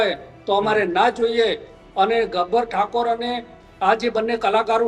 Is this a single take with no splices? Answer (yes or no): yes